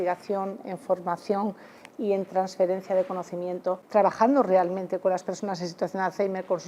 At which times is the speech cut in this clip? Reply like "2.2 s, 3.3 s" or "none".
3.8 s